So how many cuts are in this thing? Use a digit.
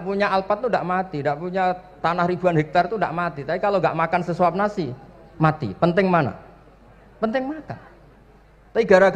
0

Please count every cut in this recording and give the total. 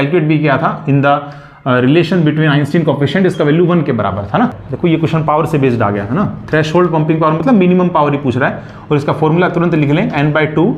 1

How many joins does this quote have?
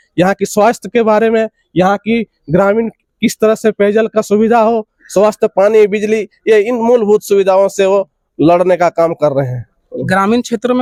0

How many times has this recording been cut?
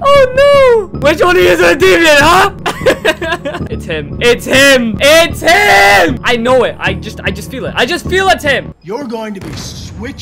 6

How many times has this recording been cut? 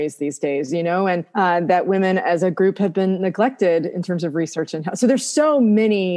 1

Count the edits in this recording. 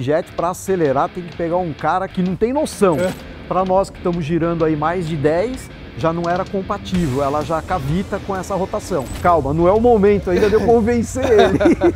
3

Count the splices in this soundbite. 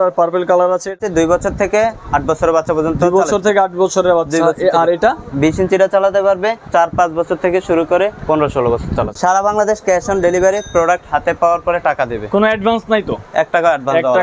5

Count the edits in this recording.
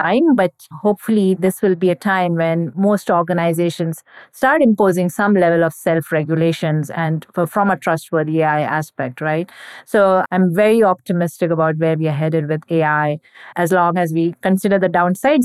0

